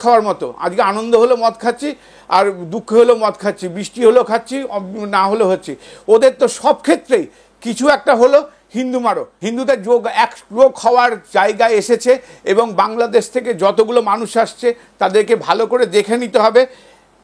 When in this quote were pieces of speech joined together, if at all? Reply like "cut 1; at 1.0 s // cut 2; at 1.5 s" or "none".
cut 1; at 9.3 s

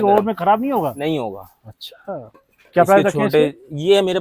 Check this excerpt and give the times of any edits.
none

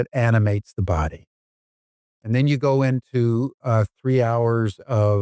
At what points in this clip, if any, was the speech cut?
none

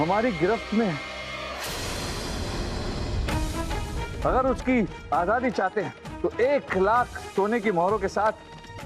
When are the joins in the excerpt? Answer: cut 1; at 6.0 s

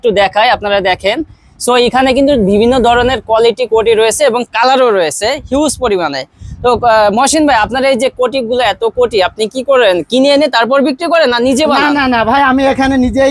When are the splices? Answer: none

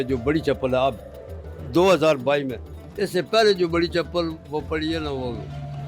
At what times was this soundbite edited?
none

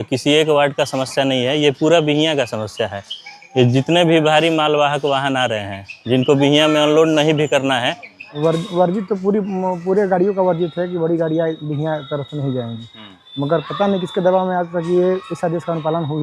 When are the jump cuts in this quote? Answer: cut 1; at 8.2 s

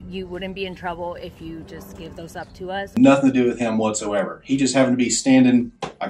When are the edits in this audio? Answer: cut 1; at 2.8 s

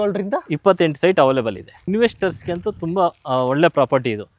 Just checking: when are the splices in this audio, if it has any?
cut 1; at 1.8 s

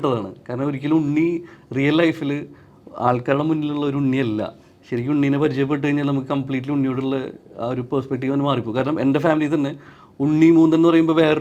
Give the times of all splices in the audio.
none

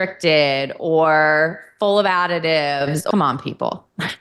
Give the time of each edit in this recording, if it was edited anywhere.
cut 1; at 3.0 s

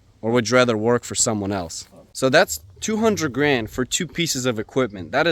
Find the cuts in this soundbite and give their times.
cut 1; at 2.4 s

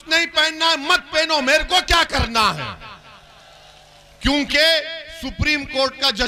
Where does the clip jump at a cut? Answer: none

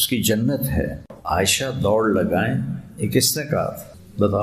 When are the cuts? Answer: cut 1; at 1.1 s

